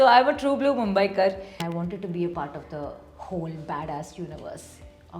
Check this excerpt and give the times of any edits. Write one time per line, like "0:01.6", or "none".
0:01.6